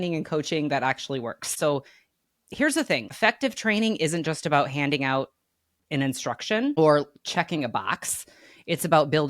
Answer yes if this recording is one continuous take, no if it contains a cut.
no